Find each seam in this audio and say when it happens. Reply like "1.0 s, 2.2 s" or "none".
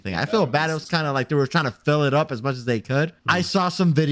3.2 s